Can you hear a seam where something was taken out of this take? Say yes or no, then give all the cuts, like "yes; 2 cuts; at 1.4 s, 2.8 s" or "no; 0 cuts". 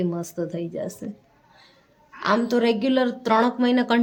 no; 0 cuts